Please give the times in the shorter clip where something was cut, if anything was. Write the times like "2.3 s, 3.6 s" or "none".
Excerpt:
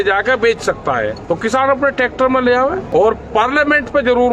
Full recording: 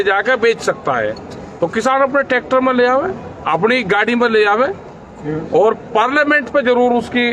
1.2 s, 2.8 s